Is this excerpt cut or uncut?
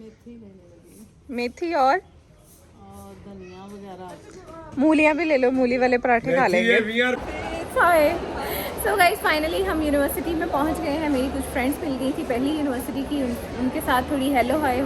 cut